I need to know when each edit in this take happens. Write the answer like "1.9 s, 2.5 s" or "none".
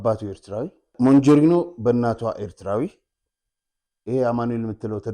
0.9 s